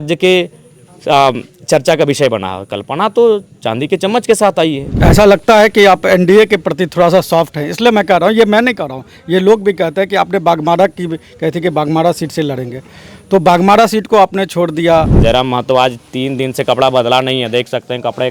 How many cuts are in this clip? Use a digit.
2